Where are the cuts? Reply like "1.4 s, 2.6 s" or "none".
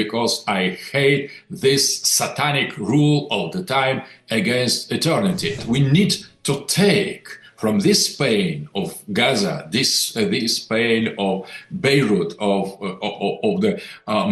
5.6 s